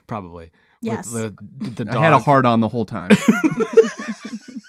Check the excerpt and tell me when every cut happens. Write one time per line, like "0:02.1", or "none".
none